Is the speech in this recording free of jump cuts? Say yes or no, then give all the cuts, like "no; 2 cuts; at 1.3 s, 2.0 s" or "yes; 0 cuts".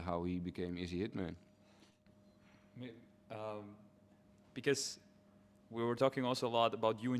yes; 0 cuts